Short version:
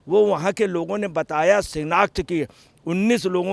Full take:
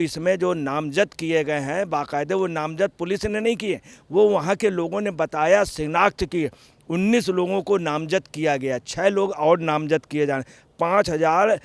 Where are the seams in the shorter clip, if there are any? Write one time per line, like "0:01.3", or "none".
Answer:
none